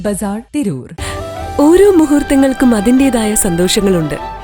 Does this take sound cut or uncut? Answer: cut